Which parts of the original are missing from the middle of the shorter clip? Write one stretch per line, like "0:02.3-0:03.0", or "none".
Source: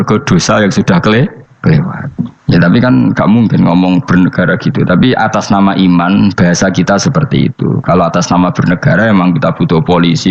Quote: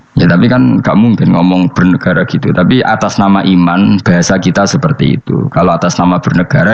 none

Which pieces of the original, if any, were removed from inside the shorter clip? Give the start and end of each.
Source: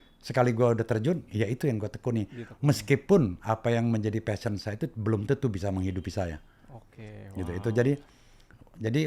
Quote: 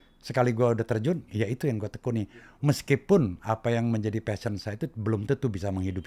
none

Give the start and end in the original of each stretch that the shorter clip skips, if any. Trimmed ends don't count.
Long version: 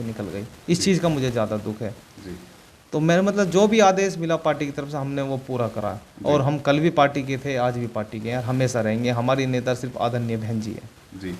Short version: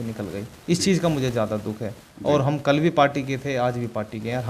0:02.1-0:06.1

